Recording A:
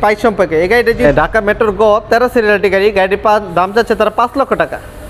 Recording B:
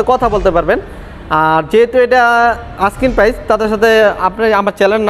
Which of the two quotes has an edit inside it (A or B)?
A